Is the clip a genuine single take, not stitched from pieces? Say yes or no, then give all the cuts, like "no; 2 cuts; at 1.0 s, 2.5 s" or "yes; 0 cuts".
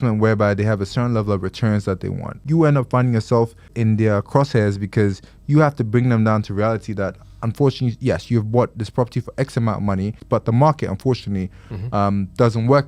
no; 3 cuts; at 2.4 s, 3.7 s, 10.2 s